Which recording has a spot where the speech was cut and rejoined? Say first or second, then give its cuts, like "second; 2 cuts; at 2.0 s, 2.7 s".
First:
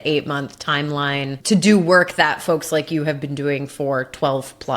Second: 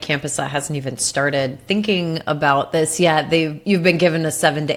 first; 1 cut; at 1.4 s